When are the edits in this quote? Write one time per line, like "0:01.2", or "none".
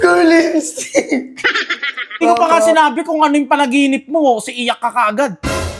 0:02.2